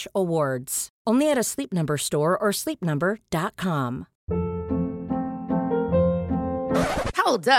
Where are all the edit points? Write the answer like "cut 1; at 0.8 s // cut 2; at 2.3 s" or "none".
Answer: cut 1; at 4.1 s